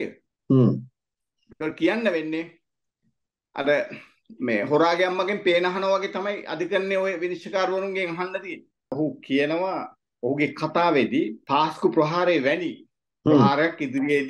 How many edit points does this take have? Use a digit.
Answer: 2